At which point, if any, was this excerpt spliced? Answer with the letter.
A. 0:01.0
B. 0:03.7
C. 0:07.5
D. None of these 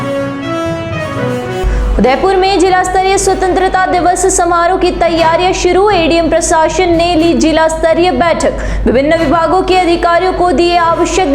A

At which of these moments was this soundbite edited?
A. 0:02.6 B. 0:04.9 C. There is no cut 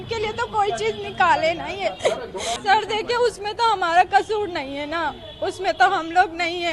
A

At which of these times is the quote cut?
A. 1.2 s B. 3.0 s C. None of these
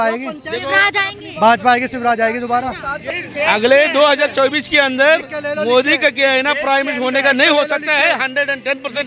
B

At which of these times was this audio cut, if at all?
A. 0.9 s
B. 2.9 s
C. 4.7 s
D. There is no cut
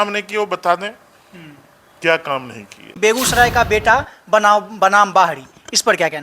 B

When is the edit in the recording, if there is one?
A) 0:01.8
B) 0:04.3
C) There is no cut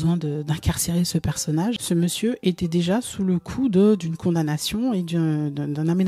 A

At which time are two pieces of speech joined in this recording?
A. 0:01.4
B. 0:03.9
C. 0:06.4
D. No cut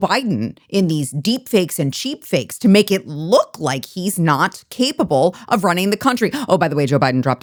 D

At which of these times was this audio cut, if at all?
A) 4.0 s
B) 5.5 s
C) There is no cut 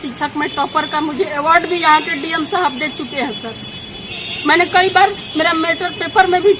C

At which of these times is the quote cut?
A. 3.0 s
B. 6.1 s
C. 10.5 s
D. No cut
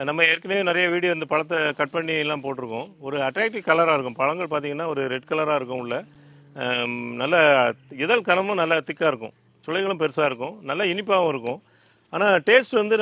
D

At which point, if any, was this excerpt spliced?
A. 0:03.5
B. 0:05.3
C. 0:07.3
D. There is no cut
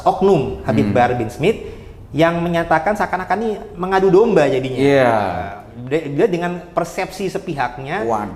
D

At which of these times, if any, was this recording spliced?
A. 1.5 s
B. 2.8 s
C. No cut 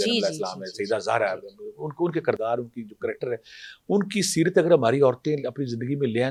C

